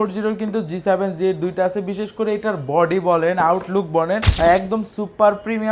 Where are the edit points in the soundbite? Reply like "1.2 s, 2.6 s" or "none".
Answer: 4.3 s